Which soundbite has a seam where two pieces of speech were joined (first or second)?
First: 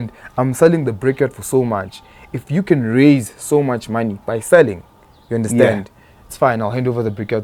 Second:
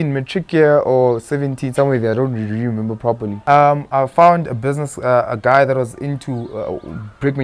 second